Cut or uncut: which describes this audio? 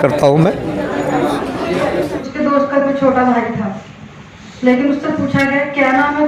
cut